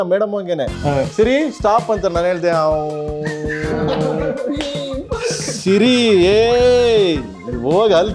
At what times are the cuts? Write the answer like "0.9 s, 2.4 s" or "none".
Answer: none